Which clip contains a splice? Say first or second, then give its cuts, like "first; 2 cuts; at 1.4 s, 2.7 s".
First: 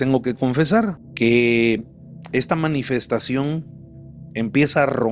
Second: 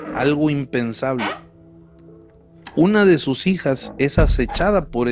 first; 1 cut; at 1.0 s